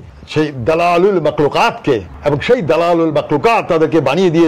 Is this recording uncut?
no; 1 cut; at 2.1 s

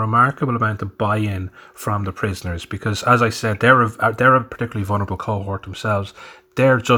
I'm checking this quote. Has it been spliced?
no; 0 cuts

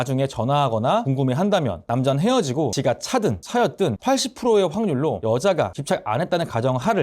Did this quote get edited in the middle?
yes; 1 cut; at 5.7 s

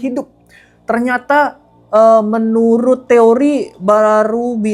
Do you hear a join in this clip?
no; 0 cuts

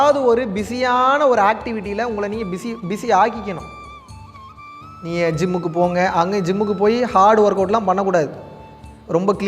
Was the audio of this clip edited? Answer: no; 0 cuts

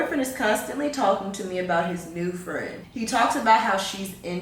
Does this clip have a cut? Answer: no; 0 cuts

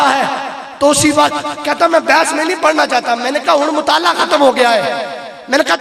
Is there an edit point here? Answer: no; 0 cuts

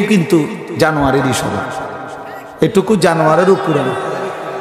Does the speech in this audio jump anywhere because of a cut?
no; 0 cuts

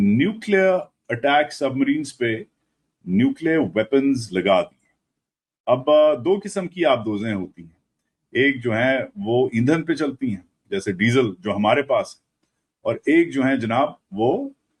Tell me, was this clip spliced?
no; 0 cuts

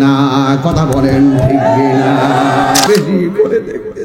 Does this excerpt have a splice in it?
yes; 1 cut; at 2.8 s

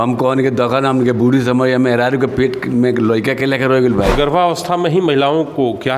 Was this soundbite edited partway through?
yes; 1 cut; at 4.1 s

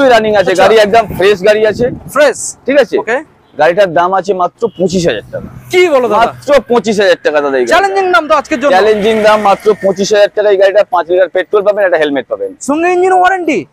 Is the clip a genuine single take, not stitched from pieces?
yes; 0 cuts

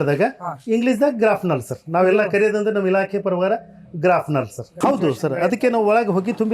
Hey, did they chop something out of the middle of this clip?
yes; 1 cut; at 4.7 s

